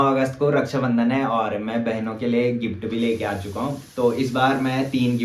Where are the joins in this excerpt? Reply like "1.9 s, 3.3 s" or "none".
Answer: none